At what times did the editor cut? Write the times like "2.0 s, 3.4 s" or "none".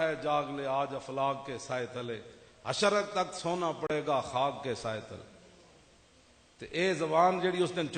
none